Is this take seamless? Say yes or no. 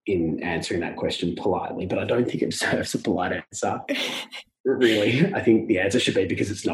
yes